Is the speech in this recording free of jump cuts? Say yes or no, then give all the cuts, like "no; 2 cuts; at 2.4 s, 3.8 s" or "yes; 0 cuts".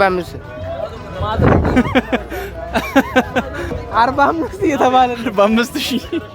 no; 1 cut; at 3.7 s